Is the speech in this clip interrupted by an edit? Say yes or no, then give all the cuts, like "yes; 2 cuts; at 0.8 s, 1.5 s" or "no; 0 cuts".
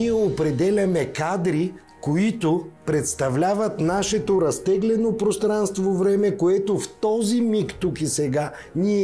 yes; 2 cuts; at 1.9 s, 2.7 s